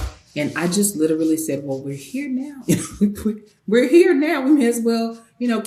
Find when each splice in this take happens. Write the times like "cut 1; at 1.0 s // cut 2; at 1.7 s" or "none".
none